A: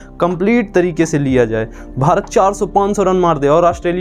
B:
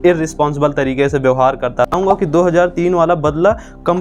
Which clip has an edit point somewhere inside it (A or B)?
B